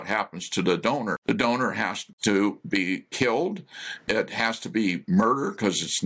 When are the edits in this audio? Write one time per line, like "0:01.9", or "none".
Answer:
0:01.2
0:02.1